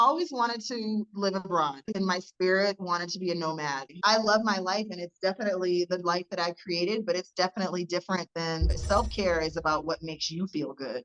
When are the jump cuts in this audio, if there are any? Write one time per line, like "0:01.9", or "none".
0:01.9
0:03.9
0:08.7